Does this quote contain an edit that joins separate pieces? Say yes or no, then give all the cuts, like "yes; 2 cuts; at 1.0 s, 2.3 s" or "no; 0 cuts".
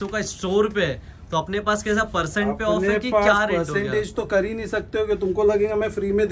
no; 0 cuts